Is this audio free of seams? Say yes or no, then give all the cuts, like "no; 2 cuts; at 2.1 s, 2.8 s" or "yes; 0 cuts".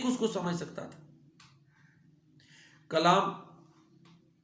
no; 1 cut; at 1.7 s